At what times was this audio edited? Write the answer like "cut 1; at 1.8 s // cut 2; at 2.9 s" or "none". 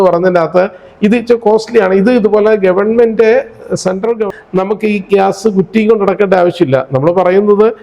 cut 1; at 4.2 s